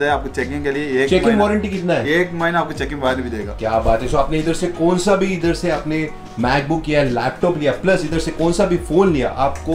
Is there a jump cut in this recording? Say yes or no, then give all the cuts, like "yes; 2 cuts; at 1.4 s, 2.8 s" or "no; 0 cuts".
no; 0 cuts